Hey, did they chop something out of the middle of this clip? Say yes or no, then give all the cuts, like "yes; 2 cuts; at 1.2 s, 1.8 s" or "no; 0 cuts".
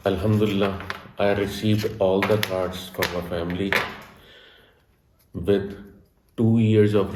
no; 0 cuts